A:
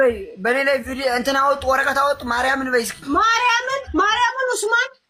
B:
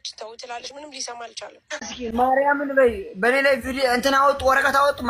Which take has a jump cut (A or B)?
B